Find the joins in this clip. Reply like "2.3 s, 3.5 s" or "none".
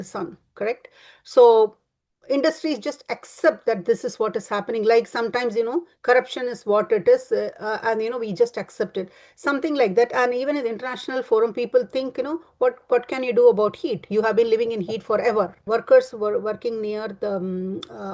15.6 s